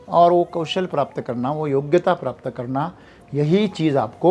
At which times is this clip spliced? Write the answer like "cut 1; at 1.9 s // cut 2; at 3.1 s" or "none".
none